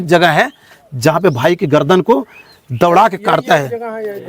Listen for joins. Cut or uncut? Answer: uncut